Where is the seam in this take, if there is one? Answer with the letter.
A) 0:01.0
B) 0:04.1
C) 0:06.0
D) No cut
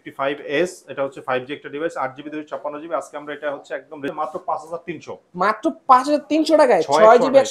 B